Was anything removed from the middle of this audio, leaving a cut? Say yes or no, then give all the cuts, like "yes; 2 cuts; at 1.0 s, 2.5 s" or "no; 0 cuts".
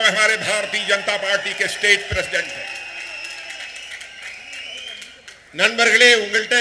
no; 0 cuts